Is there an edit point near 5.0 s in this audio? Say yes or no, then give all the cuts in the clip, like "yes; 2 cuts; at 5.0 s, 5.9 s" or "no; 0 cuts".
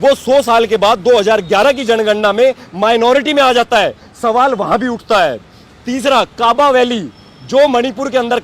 no; 0 cuts